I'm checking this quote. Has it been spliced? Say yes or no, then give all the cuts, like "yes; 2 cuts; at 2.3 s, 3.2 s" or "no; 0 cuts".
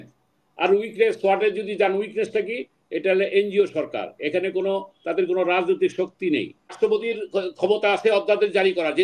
yes; 1 cut; at 6.7 s